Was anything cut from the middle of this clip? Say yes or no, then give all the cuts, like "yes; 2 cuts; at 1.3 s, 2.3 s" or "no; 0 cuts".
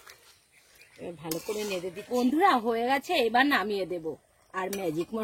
yes; 1 cut; at 2.0 s